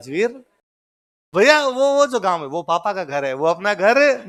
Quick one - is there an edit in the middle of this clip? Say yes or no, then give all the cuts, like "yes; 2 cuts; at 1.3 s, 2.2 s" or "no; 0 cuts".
no; 0 cuts